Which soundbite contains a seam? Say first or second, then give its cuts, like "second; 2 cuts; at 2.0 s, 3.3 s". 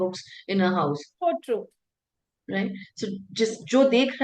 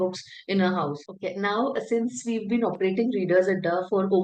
second; 1 cut; at 1.0 s